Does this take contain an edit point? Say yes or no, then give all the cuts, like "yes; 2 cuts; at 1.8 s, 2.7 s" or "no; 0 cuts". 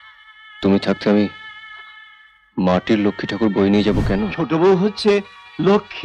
yes; 1 cut; at 4.4 s